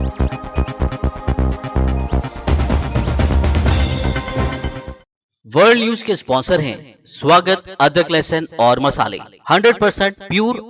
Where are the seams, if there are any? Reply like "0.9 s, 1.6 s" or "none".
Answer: 5.0 s